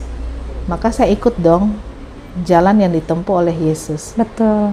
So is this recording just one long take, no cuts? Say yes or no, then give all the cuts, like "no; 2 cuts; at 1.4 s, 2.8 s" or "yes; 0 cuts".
yes; 0 cuts